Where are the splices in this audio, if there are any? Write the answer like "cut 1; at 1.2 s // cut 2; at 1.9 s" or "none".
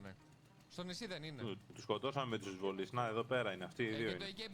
none

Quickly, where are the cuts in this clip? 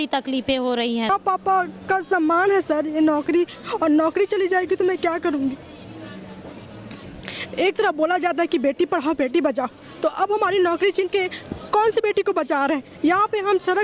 cut 1; at 1.1 s

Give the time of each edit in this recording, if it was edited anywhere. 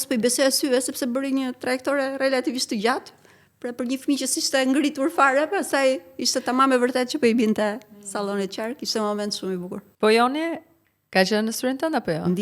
cut 1; at 9.8 s

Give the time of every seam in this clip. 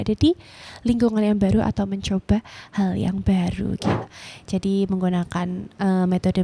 cut 1; at 4.0 s

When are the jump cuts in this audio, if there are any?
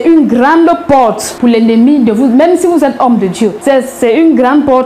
cut 1; at 1.3 s // cut 2; at 3.6 s

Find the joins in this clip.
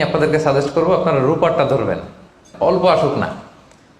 cut 1; at 2.5 s

